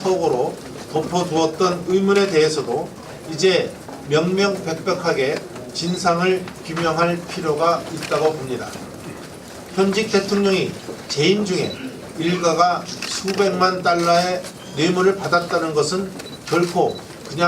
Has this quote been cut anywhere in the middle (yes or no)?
yes